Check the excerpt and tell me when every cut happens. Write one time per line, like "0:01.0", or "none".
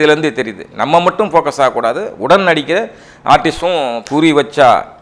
0:04.0